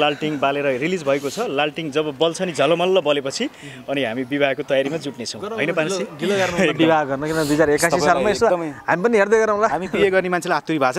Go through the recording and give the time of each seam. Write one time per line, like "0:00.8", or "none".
none